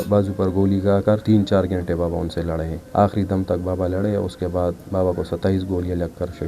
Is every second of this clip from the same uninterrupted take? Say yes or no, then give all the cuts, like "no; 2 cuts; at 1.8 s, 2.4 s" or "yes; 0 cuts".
no; 2 cuts; at 1.2 s, 2.8 s